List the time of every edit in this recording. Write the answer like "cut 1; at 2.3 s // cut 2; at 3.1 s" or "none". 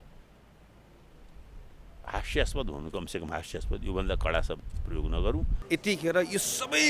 cut 1; at 5.5 s